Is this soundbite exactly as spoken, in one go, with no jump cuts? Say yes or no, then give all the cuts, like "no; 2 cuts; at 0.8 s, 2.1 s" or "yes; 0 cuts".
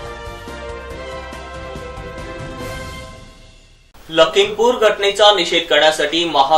no; 1 cut; at 3.6 s